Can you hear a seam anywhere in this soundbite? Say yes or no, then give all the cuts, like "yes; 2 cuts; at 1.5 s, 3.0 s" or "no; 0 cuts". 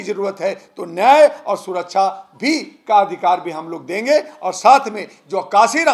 no; 0 cuts